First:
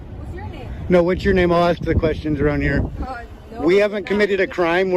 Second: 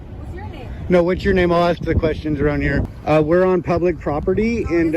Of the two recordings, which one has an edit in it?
second; 1 cut; at 2.9 s

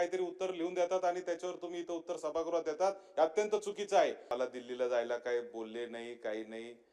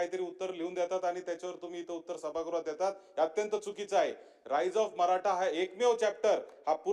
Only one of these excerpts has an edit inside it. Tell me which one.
first; 1 cut; at 4.3 s

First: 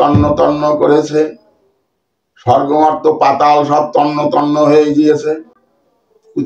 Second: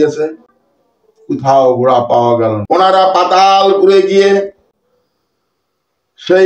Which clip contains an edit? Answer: second; 1 cut; at 2.6 s

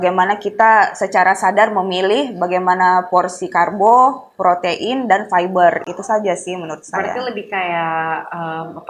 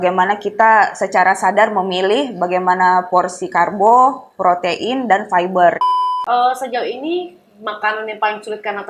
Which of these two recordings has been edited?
second; 1 cut; at 5.9 s

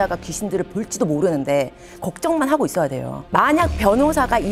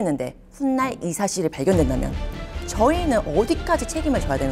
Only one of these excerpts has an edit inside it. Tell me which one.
first; 1 cut; at 3.1 s

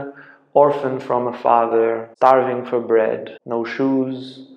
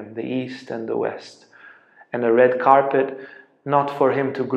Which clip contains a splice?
first; 2 cuts; at 2.1 s, 3.3 s

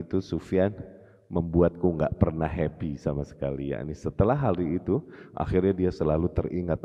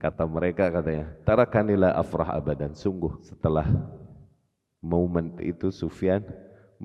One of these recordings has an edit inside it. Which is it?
second; 2 cuts; at 1.1 s, 3.3 s

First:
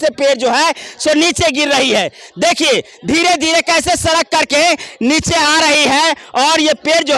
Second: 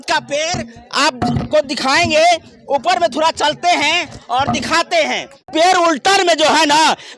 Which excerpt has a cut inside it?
second; 1 cut; at 5.4 s

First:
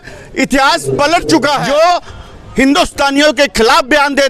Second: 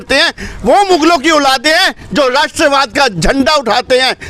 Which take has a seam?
first; 1 cut; at 1.6 s

